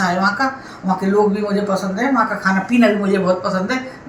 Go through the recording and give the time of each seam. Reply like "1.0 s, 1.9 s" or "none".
none